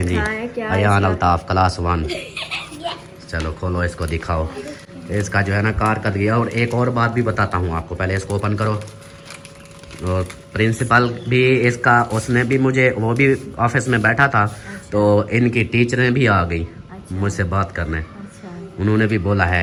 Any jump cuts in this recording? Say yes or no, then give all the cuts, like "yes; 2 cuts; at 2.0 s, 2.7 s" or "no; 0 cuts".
no; 0 cuts